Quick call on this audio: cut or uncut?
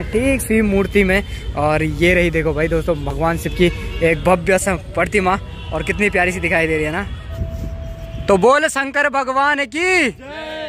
uncut